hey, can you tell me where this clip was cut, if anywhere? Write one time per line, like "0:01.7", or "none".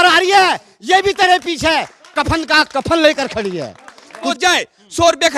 0:04.3